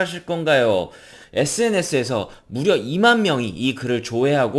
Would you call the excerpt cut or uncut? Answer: cut